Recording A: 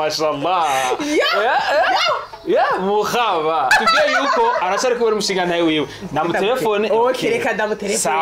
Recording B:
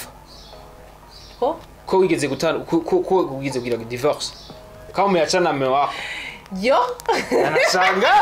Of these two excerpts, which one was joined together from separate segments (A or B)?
A